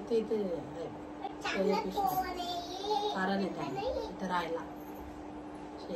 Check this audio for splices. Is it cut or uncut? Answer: uncut